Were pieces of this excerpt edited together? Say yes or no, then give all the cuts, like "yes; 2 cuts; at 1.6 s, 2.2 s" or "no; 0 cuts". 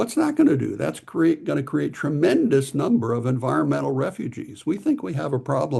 no; 0 cuts